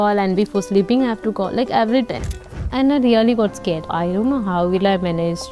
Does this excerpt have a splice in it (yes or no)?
yes